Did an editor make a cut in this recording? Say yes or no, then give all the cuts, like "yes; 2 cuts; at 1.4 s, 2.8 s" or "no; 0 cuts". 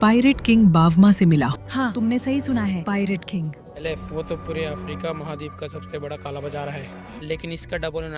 yes; 2 cuts; at 3.7 s, 7.1 s